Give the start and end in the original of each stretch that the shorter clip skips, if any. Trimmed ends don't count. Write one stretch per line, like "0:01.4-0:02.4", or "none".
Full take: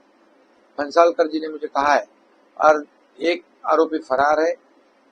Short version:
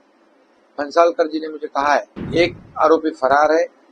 0:02.2-0:03.0